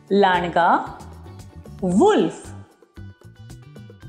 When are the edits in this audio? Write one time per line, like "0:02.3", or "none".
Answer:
0:02.4